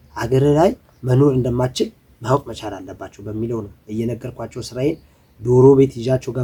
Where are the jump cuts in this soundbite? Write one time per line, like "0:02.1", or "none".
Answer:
none